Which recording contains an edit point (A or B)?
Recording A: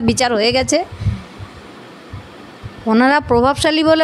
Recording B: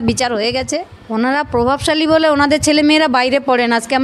B